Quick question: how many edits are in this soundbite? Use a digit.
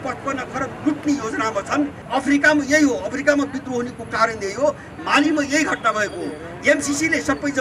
1